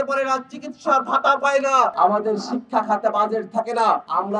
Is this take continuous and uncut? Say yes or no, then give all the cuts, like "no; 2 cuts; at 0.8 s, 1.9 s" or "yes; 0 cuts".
no; 1 cut; at 1.9 s